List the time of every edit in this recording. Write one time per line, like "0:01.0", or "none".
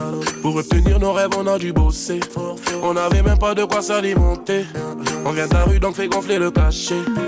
none